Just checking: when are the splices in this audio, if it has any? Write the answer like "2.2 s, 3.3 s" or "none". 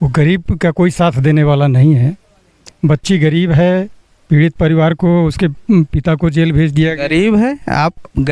none

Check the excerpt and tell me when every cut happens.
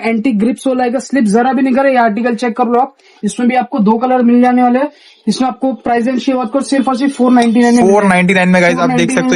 none

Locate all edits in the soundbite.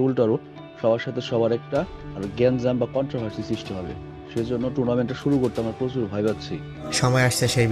6.8 s

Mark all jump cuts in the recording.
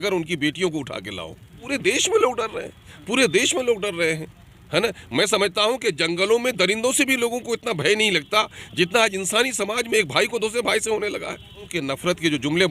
1.6 s, 11.7 s

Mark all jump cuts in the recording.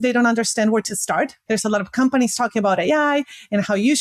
1.4 s

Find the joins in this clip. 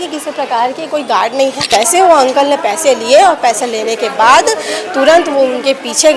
1.7 s

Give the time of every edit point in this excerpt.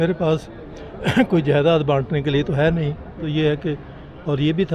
3.2 s

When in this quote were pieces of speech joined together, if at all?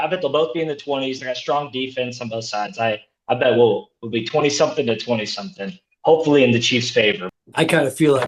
7.3 s

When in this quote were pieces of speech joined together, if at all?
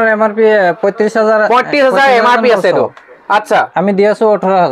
none

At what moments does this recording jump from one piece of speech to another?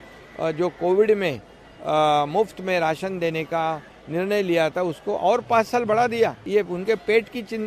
6.4 s

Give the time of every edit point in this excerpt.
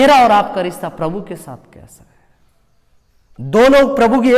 none

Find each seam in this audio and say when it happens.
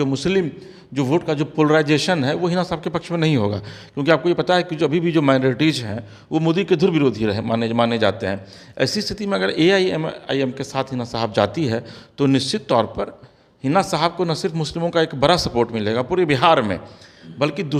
none

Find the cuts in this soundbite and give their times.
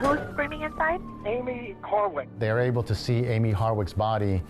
1.1 s, 2.3 s

